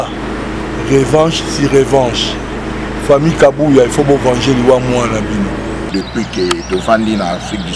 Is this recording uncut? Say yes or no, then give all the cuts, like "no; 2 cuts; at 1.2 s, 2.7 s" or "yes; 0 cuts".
no; 1 cut; at 5.8 s